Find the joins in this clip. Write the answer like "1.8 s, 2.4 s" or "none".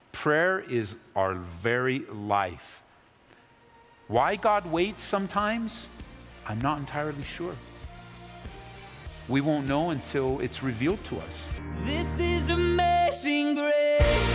11.8 s